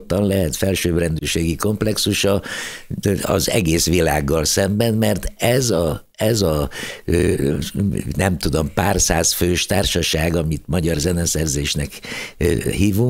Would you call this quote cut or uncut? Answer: uncut